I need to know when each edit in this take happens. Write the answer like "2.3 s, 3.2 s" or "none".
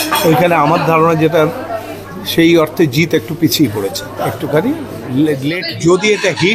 5.6 s